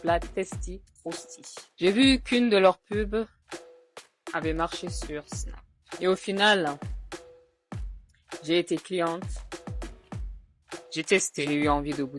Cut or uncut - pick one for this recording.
cut